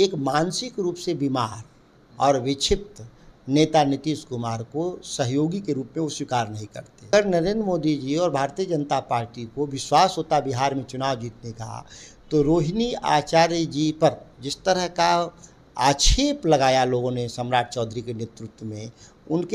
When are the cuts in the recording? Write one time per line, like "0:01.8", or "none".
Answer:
0:07.1